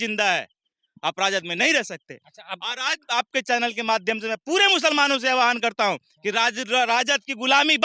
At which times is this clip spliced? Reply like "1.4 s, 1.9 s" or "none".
none